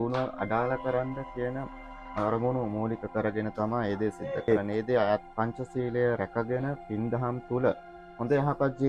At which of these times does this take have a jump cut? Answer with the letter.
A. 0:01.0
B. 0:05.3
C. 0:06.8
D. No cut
B